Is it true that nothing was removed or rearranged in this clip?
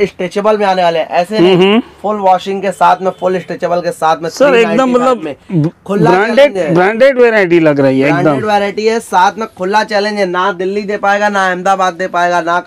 yes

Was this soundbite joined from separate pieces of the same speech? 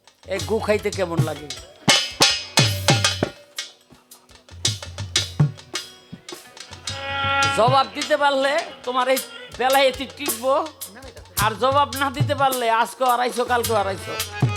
no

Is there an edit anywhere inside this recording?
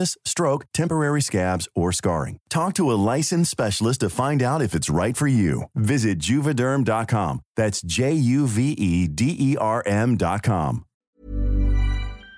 yes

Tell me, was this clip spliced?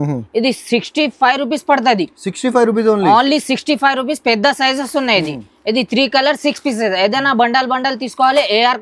no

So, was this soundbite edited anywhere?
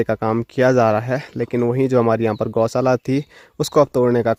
no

